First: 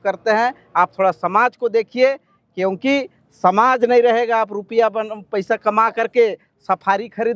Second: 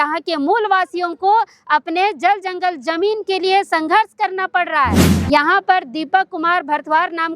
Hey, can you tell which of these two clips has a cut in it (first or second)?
second